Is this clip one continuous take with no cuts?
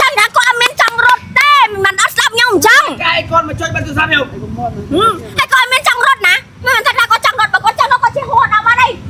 yes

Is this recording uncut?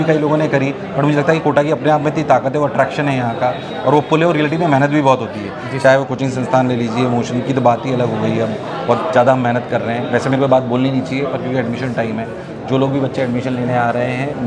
yes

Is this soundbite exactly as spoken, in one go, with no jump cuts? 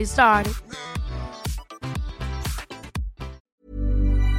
no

